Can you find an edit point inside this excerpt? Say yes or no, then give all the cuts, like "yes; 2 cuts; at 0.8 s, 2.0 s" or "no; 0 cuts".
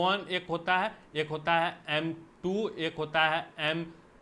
no; 0 cuts